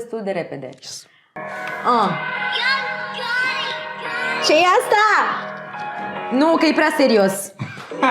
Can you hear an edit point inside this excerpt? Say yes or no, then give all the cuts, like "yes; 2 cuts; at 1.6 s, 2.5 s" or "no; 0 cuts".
yes; 1 cut; at 1.3 s